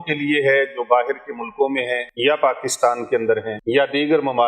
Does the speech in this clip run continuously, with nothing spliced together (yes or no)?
no